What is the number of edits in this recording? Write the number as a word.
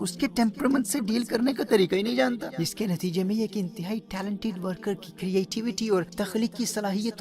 two